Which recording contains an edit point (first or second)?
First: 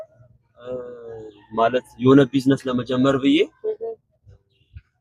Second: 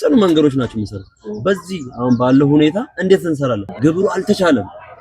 second